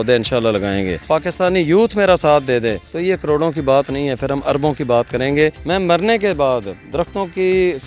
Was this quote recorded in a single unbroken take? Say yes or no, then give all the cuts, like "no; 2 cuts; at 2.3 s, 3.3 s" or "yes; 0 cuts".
no; 3 cuts; at 1.0 s, 2.9 s, 5.6 s